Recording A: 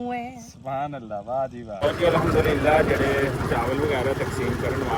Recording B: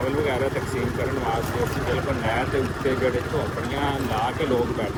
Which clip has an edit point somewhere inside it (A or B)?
A